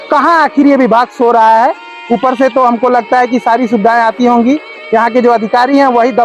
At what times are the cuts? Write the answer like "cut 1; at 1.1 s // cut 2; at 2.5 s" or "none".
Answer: none

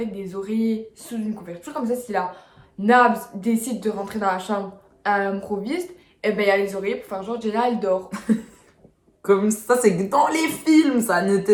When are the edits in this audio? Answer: none

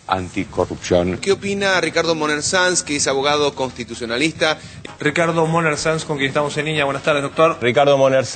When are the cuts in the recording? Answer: none

